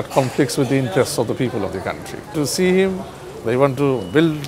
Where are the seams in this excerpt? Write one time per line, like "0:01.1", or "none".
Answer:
0:02.3